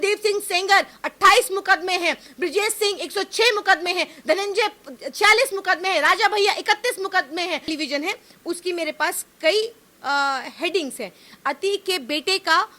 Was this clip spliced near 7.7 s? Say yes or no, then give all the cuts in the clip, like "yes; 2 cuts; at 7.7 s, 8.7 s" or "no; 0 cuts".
yes; 1 cut; at 7.7 s